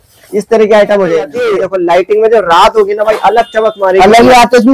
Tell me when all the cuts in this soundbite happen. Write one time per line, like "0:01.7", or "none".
0:01.4